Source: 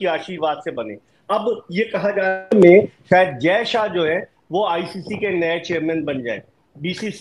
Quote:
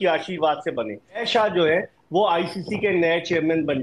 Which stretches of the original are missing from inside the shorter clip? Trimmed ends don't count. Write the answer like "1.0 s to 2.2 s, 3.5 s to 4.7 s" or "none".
1.2 s to 3.6 s